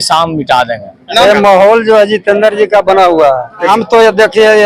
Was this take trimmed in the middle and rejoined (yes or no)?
yes